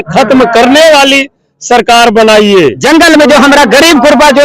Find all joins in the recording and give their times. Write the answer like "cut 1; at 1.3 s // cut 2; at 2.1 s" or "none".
cut 1; at 2.8 s